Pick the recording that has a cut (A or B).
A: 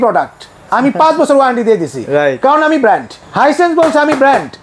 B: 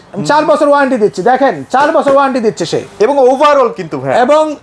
A